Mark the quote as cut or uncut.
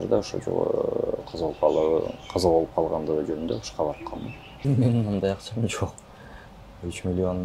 cut